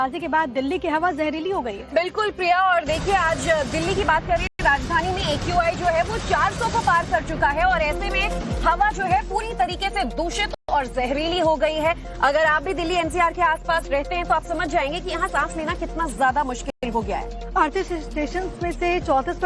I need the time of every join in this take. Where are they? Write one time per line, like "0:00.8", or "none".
none